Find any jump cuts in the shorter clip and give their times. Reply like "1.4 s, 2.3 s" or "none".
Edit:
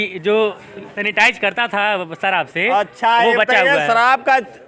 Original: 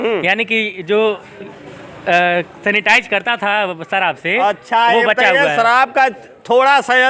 0.9 s